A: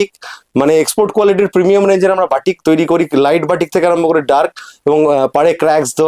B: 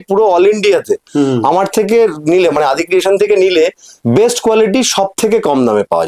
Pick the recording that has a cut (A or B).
B